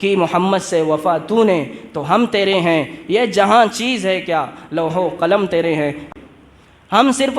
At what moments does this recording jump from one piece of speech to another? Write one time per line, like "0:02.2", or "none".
0:06.0